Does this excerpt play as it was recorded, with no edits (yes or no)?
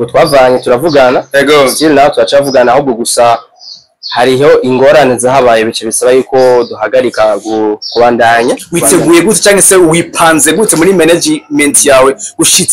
no